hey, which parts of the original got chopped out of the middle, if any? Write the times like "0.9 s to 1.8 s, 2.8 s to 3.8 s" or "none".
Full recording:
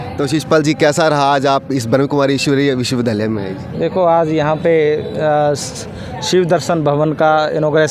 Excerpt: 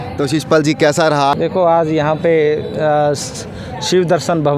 1.3 s to 3.7 s